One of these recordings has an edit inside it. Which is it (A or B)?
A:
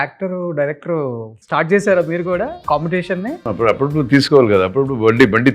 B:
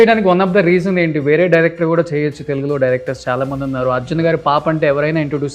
A